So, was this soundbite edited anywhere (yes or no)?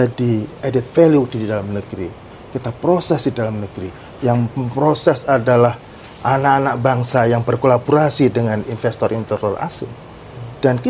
no